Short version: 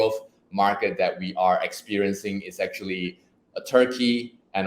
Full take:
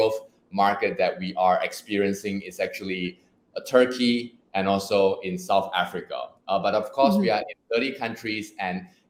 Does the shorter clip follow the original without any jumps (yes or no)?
yes